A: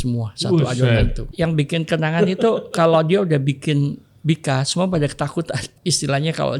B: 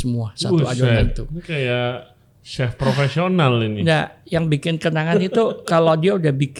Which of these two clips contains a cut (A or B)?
A